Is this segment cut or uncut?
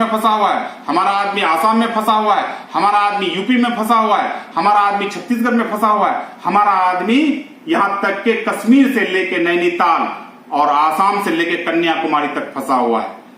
uncut